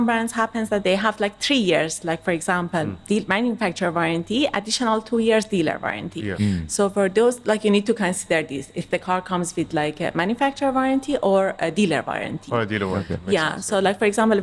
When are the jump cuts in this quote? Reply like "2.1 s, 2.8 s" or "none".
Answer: none